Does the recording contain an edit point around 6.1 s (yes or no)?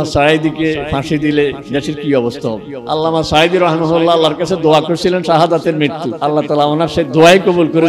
yes